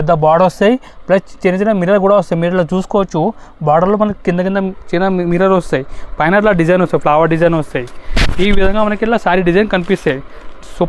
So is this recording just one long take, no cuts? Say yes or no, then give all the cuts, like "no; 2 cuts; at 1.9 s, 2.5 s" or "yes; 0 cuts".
yes; 0 cuts